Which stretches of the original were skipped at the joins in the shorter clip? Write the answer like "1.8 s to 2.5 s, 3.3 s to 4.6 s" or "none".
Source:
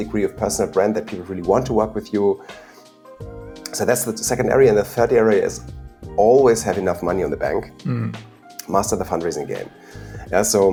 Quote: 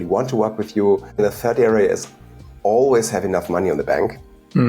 2.6 s to 4.7 s